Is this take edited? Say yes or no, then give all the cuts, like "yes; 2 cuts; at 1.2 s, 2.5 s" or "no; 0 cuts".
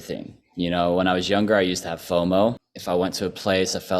yes; 1 cut; at 2.7 s